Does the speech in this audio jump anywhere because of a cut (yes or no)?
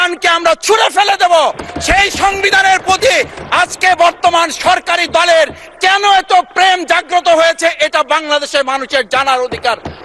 no